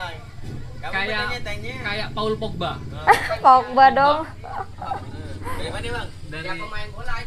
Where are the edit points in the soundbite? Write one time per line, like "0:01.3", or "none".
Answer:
none